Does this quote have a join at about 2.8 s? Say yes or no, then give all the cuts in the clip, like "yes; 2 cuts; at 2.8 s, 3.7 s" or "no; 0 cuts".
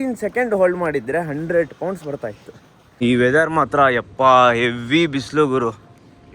yes; 1 cut; at 2.8 s